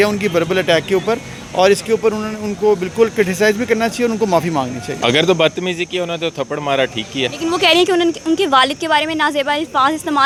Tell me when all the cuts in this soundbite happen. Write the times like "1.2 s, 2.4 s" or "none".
none

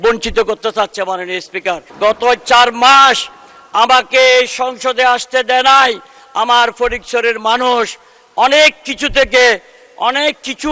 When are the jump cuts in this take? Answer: 1.8 s

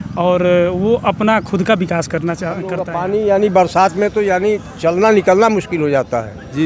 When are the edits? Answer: 2.8 s

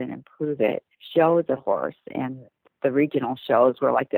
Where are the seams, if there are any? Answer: 0.9 s, 2.1 s

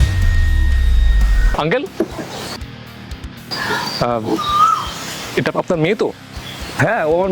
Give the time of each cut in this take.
1.6 s

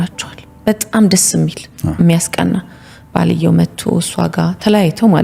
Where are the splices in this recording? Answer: none

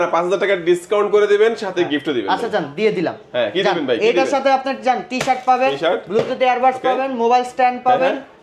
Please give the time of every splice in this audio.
none

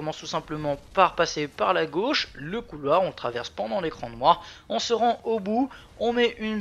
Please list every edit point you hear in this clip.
4.9 s

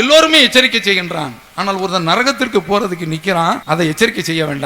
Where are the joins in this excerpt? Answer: 3.6 s

